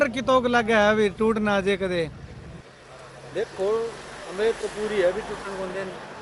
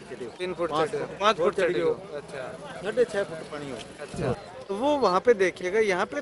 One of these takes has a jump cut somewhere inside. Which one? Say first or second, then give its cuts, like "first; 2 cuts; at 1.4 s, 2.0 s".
second; 1 cut; at 4.5 s